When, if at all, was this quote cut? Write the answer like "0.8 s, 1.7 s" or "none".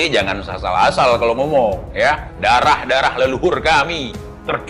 none